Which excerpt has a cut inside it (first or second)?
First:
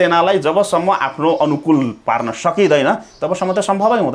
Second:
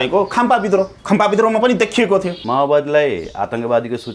second